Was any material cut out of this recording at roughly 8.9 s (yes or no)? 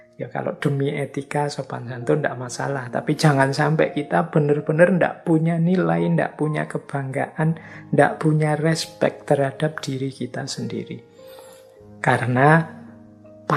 yes